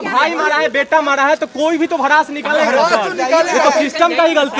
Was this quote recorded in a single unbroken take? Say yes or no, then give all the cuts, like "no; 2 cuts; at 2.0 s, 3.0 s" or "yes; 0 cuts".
yes; 0 cuts